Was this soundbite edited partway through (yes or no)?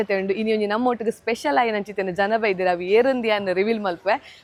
no